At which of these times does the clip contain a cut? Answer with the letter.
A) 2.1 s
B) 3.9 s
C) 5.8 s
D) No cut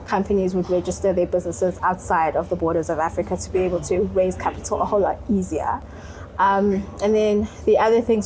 D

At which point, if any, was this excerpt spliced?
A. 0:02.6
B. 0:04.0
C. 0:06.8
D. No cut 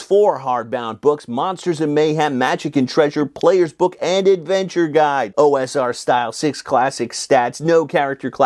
D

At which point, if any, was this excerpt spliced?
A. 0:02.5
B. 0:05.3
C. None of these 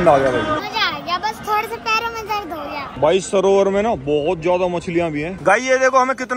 B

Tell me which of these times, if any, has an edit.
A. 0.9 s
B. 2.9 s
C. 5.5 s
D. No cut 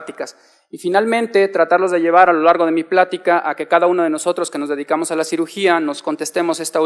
D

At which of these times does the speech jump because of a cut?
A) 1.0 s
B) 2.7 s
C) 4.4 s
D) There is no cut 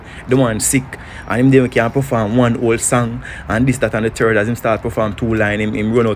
D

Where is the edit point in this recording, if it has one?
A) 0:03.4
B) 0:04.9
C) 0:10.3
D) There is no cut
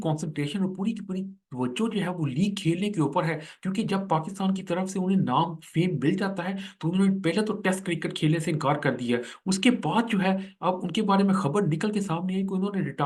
D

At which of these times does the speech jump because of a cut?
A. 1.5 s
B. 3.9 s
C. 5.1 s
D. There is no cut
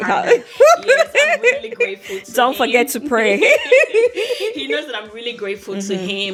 D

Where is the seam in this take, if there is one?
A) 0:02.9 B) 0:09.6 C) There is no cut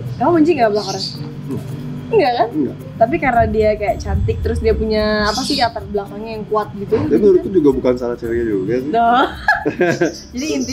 A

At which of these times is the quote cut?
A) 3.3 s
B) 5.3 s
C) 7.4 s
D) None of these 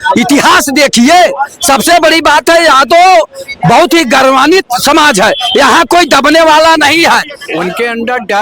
C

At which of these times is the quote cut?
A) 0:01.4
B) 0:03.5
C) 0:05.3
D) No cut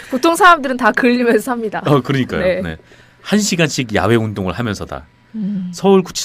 B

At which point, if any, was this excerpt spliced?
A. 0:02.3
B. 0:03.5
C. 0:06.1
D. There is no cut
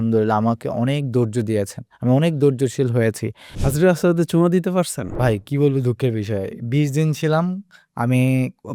B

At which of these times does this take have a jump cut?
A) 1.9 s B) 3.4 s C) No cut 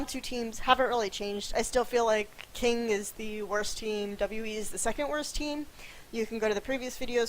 B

